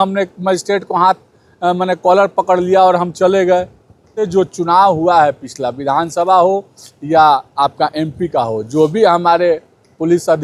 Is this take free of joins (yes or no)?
no